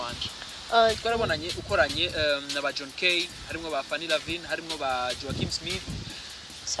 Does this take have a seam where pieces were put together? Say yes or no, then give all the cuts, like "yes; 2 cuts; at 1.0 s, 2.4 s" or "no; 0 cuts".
yes; 1 cut; at 1.0 s